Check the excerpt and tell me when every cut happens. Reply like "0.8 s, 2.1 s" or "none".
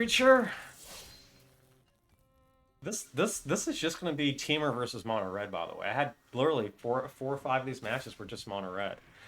2.8 s

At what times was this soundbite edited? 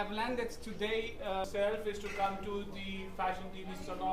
1.4 s

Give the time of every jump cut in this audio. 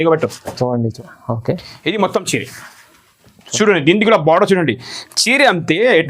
0.9 s

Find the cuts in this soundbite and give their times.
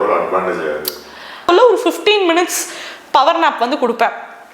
1.5 s

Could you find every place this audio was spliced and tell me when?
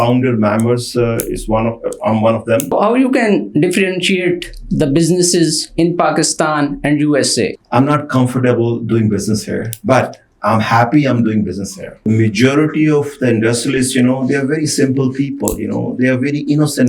2.7 s, 7.6 s, 12.1 s

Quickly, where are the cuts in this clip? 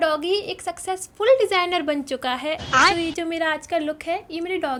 none

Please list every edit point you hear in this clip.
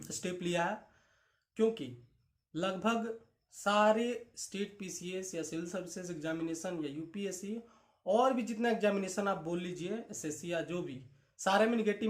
none

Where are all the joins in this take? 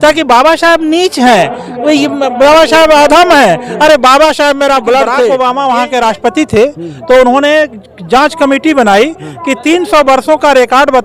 5.3 s

